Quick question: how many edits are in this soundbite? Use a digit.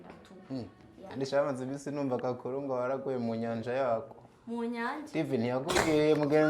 1